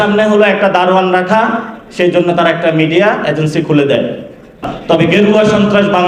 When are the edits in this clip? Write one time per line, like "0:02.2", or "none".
0:04.7